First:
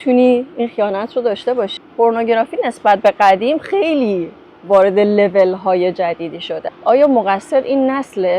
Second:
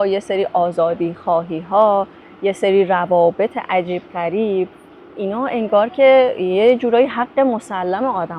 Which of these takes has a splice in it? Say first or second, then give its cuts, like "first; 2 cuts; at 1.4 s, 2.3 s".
first; 2 cuts; at 1.8 s, 6.7 s